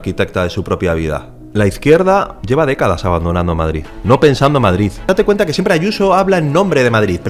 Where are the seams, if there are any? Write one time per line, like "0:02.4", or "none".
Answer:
0:01.3
0:02.4
0:03.9
0:05.1